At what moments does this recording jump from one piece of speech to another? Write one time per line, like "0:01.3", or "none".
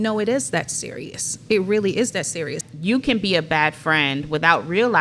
0:02.7